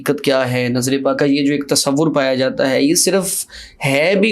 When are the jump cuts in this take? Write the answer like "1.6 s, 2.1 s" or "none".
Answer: 1.2 s

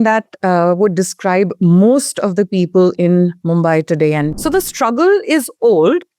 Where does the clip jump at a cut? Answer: 4.4 s

